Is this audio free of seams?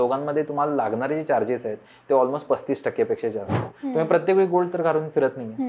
no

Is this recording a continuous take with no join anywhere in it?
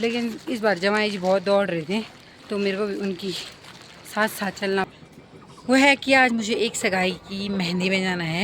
no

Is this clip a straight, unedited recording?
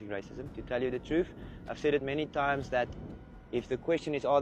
yes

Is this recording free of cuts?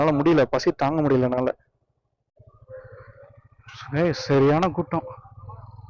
no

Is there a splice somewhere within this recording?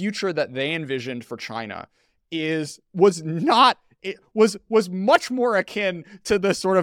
no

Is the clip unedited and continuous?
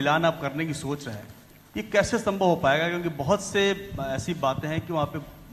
yes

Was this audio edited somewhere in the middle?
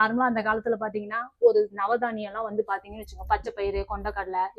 no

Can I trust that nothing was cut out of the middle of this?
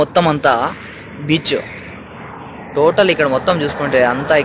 yes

